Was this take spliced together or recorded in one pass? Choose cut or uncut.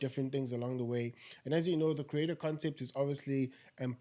uncut